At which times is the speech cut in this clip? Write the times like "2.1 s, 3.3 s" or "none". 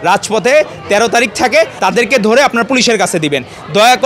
1.7 s

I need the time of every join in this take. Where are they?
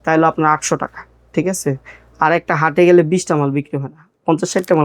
none

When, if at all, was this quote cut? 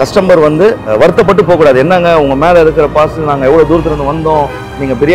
0.9 s

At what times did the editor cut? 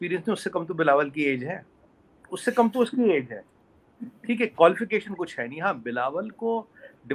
none

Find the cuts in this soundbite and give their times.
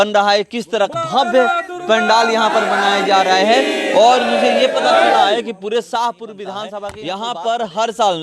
0.9 s, 6.9 s

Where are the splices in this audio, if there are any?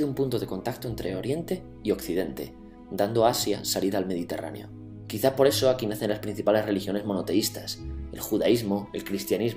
5.1 s

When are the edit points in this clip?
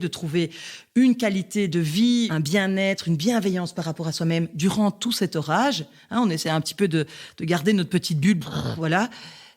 2.3 s

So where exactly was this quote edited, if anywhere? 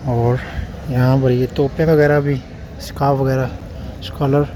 none

